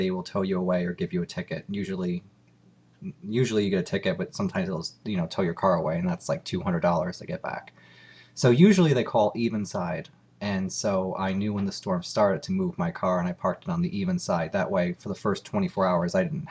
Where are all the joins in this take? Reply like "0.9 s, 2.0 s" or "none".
none